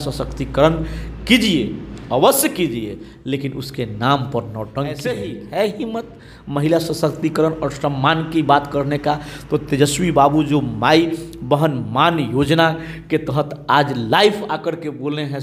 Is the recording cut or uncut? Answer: cut